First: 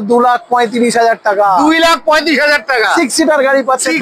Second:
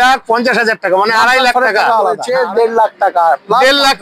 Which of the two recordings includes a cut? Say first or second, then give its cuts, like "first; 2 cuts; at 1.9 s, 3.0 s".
second; 1 cut; at 2.2 s